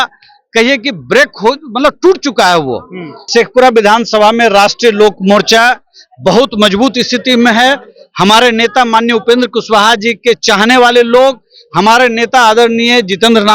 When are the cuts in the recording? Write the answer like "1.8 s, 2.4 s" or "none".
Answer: 3.3 s